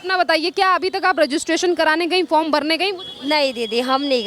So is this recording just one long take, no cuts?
yes; 0 cuts

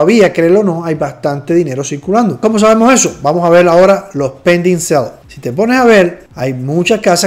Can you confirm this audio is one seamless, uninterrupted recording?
yes; 0 cuts

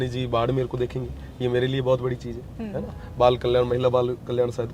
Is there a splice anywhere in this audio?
no; 0 cuts

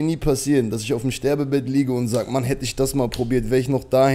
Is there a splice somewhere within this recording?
no; 0 cuts

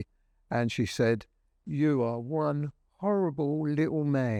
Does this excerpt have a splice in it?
no; 0 cuts

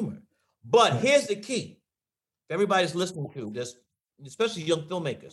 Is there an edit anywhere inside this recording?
no; 0 cuts

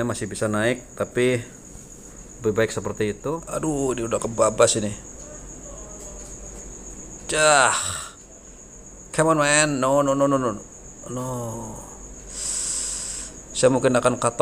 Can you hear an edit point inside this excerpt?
yes; 1 cut; at 3.2 s

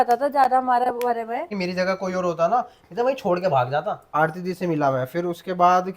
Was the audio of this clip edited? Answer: yes; 2 cuts; at 1.6 s, 4.1 s

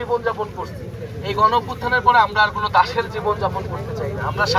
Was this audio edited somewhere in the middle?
no; 0 cuts

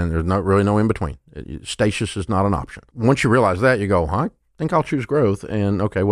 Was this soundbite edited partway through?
yes; 1 cut; at 2.8 s

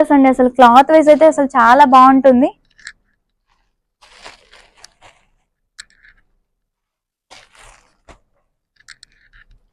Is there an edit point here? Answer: no; 0 cuts

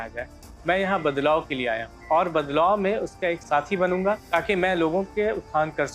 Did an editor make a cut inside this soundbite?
yes; 3 cuts; at 1.9 s, 3.4 s, 4.2 s

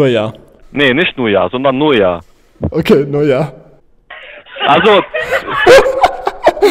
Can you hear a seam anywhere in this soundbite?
no; 0 cuts

